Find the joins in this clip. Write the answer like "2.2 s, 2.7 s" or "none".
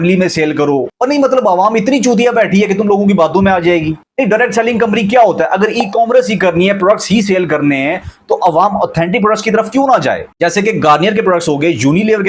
0.9 s